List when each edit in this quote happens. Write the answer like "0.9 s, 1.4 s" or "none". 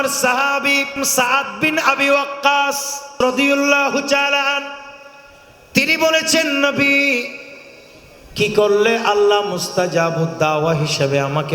1.0 s, 3.1 s